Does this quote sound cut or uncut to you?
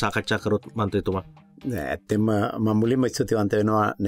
uncut